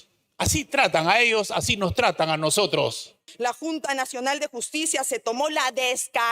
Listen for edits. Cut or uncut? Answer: cut